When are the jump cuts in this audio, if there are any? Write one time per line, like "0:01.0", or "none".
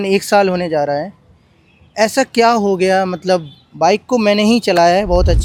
none